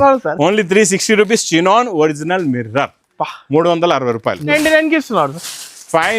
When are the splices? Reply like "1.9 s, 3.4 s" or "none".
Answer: 4.5 s

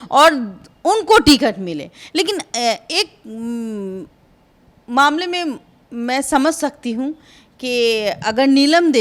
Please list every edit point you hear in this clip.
none

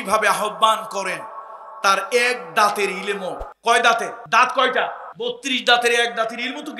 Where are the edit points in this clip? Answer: 3.5 s, 4.2 s, 5.1 s

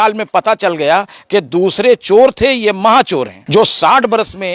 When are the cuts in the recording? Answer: 3.4 s

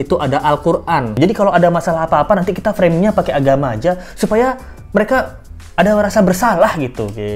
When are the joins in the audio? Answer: 1.1 s

